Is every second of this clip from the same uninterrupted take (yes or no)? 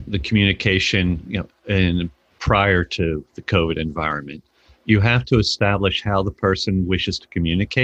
yes